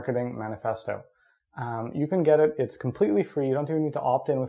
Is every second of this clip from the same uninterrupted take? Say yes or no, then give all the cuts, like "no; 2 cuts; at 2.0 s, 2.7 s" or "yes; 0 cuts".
yes; 0 cuts